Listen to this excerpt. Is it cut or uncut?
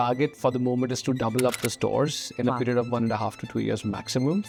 uncut